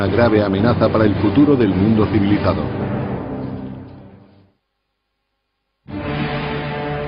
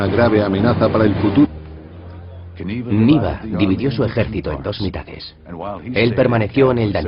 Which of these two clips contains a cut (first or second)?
first